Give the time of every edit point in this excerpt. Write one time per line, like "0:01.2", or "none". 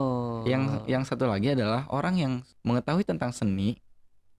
0:02.5